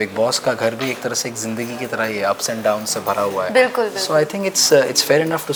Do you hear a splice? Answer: no; 0 cuts

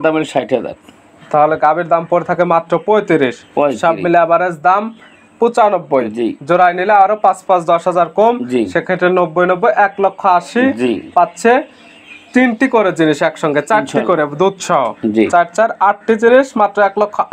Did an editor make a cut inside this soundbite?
no; 0 cuts

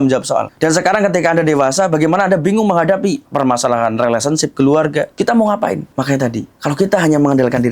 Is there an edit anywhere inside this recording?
yes; 2 cuts; at 3.3 s, 5.1 s

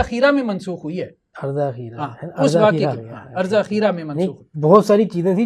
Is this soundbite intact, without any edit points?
no; 1 cut; at 1.3 s

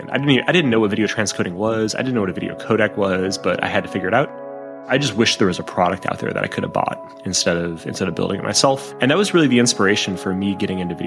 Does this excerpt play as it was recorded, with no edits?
yes; 0 cuts

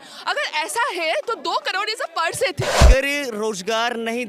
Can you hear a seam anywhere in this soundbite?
yes; 1 cut; at 2.8 s

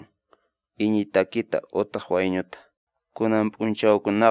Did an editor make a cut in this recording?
yes; 1 cut; at 2.8 s

